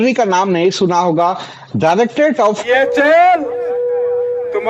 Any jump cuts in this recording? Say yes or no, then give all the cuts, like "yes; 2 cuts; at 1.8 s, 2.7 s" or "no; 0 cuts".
yes; 1 cut; at 2.6 s